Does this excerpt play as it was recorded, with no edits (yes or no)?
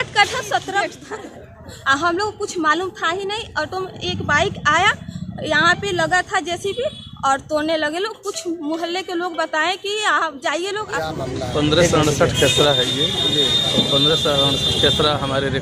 no